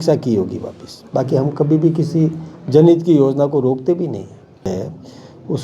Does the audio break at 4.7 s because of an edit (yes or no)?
yes